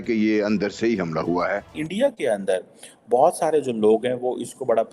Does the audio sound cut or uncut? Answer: cut